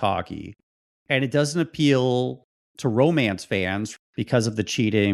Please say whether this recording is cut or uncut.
uncut